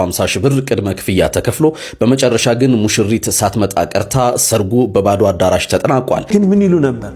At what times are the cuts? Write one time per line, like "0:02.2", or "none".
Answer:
0:06.2